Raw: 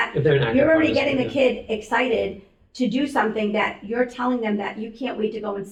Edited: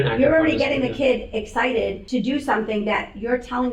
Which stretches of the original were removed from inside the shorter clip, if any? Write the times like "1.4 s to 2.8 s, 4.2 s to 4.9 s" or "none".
2.4 s to 2.7 s